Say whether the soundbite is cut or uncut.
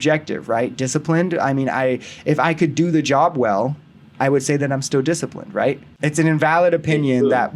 cut